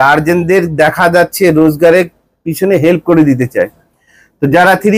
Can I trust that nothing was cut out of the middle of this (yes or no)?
yes